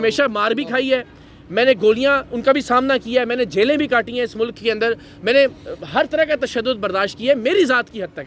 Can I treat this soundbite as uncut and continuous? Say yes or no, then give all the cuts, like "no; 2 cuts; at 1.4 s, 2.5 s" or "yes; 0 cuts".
yes; 0 cuts